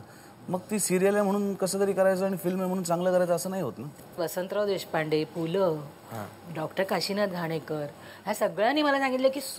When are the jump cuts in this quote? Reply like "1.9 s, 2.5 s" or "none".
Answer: 4.2 s